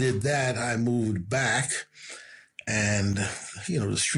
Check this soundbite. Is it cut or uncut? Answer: uncut